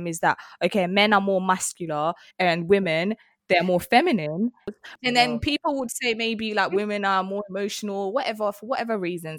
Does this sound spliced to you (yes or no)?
yes